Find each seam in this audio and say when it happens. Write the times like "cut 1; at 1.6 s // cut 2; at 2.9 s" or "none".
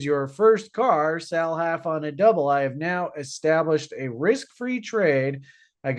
none